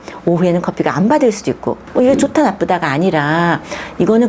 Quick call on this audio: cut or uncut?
uncut